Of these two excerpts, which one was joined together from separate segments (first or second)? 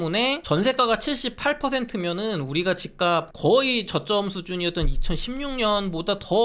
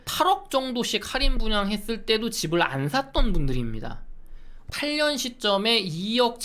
second